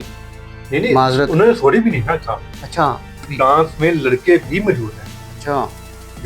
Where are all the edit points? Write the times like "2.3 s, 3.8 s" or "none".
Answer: 3.3 s